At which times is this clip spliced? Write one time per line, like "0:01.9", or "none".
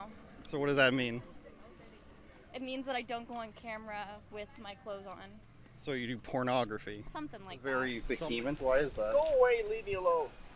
0:07.6